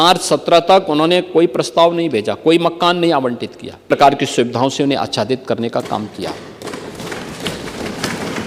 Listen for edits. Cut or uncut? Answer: cut